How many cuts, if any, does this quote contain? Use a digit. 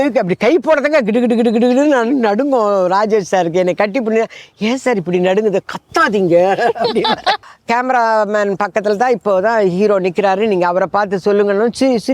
1